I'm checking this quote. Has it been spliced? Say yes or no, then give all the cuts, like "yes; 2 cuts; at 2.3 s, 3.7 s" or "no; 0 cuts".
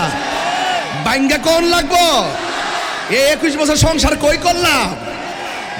no; 0 cuts